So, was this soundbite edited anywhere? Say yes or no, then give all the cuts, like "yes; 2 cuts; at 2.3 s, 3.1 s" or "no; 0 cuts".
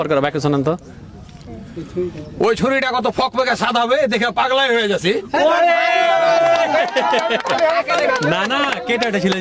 no; 0 cuts